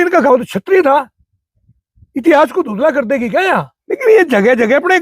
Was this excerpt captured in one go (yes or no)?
no